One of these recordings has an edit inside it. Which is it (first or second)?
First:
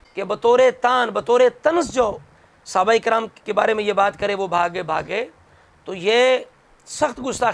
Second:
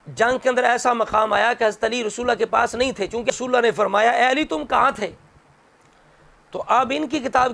second